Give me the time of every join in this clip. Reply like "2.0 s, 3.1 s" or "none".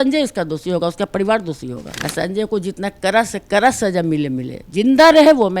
1.9 s